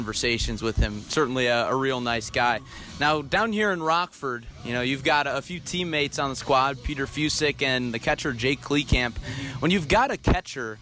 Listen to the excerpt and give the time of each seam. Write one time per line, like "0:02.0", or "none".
none